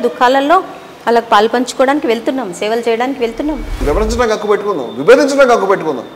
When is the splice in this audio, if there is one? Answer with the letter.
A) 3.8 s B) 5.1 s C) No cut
A